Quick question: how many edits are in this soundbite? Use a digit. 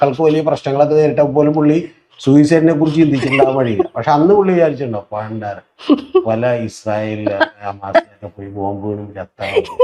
0